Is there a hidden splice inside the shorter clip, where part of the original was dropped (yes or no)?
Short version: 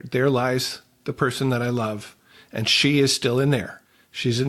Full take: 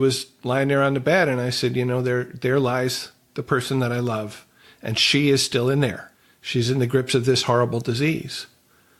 no